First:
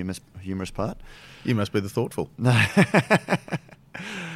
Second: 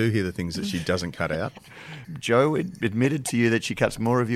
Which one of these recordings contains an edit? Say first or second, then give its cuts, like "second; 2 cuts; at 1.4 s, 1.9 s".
second; 1 cut; at 2.0 s